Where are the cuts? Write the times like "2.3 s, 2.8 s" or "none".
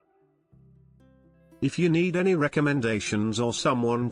1.6 s